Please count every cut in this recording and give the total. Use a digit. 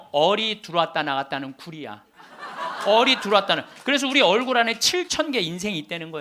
0